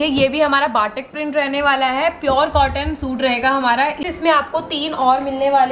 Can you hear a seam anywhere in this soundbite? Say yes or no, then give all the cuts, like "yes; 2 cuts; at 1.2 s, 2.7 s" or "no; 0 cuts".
yes; 1 cut; at 4.0 s